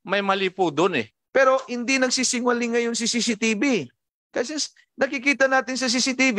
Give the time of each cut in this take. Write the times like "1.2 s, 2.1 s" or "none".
1.2 s